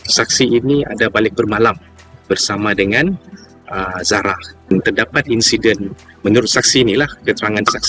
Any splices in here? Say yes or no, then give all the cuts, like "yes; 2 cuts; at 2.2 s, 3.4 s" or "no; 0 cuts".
yes; 1 cut; at 4.7 s